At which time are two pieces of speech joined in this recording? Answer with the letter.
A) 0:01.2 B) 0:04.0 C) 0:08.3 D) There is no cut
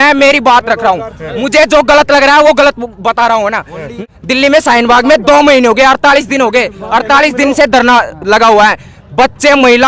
B